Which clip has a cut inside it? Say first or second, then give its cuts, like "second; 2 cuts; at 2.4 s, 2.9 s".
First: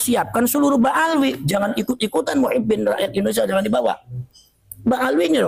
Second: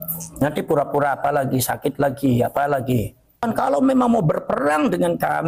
second; 1 cut; at 3.4 s